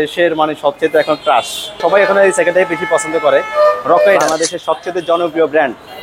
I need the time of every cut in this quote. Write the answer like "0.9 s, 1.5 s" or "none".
1.8 s, 4.2 s